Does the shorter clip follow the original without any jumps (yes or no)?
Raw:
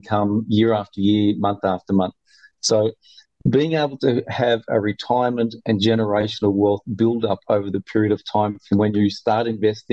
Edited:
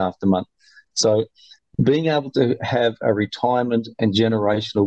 yes